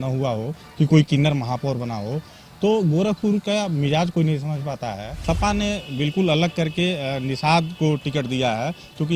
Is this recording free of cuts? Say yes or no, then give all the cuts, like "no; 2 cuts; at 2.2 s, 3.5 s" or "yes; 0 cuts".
no; 1 cut; at 5.1 s